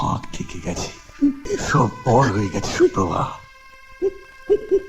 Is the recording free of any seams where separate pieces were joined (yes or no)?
no